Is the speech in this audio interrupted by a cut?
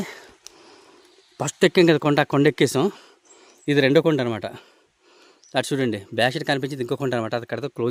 no; 0 cuts

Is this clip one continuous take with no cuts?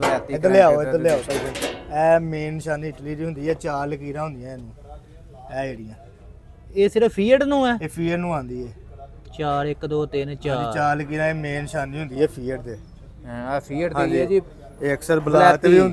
yes; 0 cuts

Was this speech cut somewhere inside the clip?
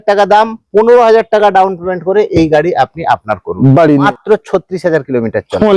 yes; 1 cut; at 4.1 s

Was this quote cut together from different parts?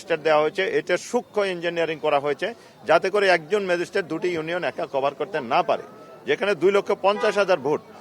no; 0 cuts

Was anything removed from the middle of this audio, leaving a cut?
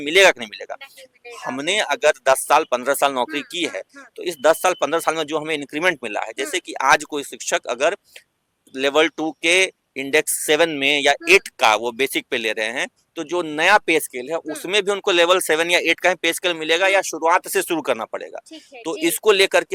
no; 0 cuts

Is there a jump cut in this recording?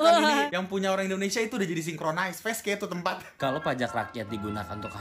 yes; 1 cut; at 3.4 s

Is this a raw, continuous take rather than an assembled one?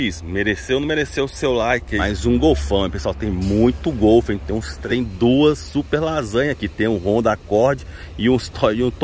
no; 2 cuts; at 1.9 s, 4.8 s

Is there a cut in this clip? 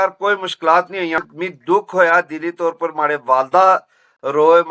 yes; 1 cut; at 1.2 s

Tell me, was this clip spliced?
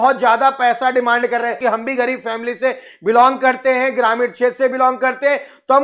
yes; 1 cut; at 1.6 s

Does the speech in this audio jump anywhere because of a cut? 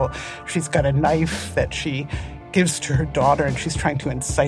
no; 0 cuts

